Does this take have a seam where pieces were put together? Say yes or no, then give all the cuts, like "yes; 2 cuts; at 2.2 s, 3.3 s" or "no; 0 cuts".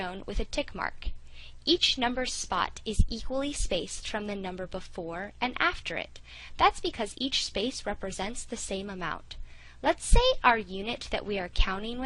yes; 1 cut; at 6.4 s